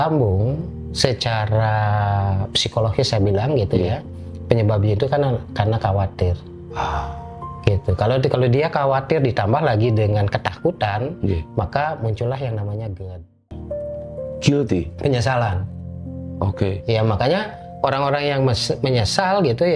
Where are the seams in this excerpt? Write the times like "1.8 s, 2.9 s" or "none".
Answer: 13.5 s